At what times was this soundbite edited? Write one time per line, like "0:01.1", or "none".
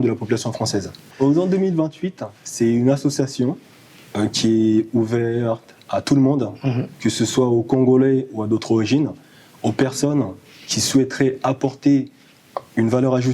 0:01.0